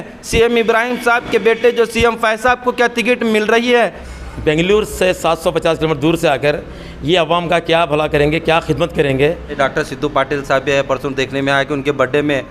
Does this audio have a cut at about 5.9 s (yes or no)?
no